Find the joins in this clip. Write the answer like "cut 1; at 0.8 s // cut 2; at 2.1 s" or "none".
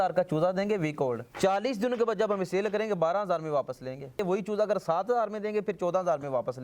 cut 1; at 1.3 s // cut 2; at 4.2 s